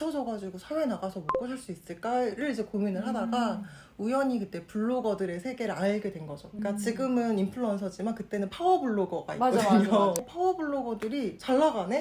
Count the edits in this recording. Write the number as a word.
zero